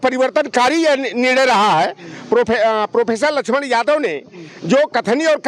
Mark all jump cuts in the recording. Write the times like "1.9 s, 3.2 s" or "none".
none